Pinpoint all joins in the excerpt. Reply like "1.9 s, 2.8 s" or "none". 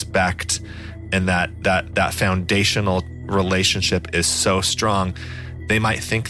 none